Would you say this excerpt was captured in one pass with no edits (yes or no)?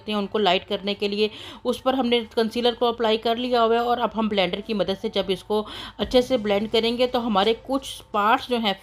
yes